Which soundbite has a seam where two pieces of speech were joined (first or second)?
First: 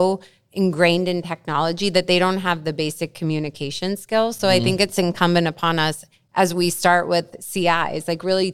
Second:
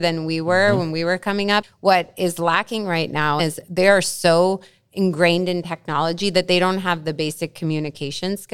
second